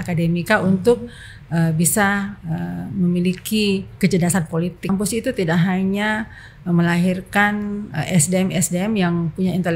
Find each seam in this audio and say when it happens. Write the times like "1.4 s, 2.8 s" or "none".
3.9 s, 4.9 s